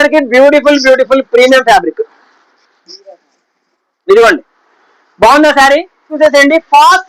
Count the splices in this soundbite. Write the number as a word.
one